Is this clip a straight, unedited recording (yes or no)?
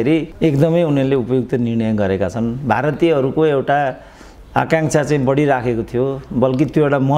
yes